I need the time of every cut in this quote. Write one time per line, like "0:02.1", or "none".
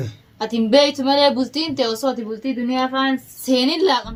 none